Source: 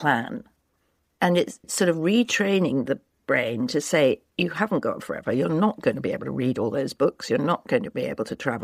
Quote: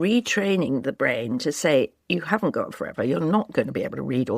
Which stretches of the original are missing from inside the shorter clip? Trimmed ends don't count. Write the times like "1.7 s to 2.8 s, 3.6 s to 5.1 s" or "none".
2.9 s to 3.2 s